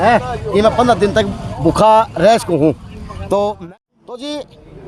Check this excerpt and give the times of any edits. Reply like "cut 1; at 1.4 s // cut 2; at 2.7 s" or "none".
cut 1; at 3.6 s